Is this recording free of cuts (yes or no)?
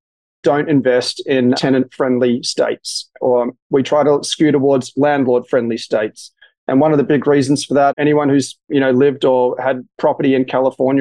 no